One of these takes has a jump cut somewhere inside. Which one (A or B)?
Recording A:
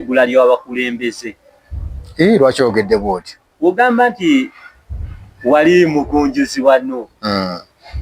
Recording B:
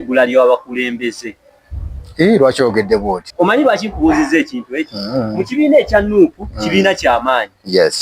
B